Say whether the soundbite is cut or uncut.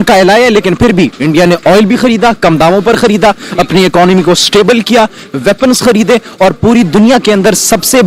uncut